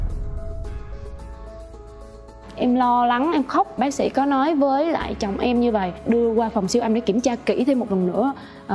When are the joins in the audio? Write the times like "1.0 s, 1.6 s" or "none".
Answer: none